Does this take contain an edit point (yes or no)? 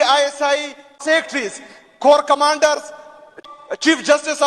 yes